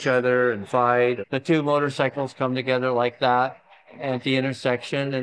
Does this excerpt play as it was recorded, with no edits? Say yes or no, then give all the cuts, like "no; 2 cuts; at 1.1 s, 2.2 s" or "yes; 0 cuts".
no; 1 cut; at 1.2 s